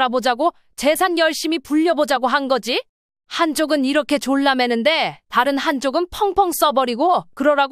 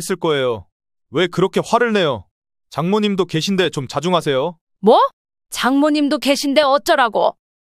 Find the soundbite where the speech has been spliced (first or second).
second